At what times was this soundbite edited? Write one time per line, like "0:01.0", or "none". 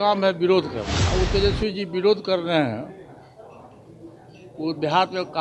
0:00.9